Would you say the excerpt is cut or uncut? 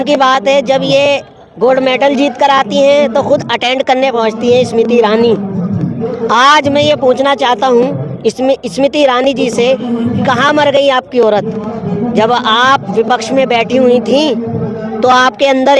uncut